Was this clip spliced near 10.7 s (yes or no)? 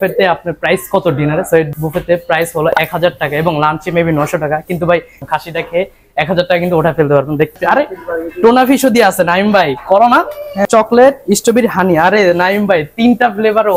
yes